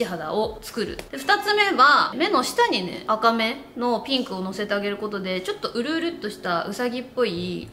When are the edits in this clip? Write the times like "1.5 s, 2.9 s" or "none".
1.0 s, 2.1 s